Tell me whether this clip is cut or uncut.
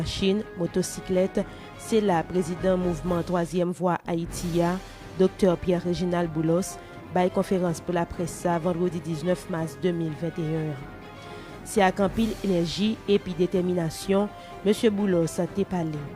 cut